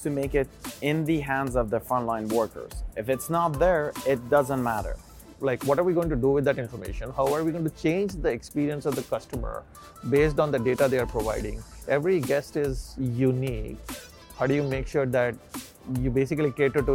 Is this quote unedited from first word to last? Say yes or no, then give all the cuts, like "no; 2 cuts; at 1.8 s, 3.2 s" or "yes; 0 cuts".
no; 2 cuts; at 5.2 s, 11.7 s